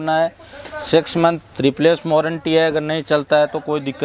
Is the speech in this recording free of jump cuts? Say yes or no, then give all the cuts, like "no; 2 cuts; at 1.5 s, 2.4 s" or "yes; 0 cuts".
yes; 0 cuts